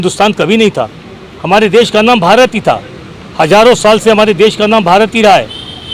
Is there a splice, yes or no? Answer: no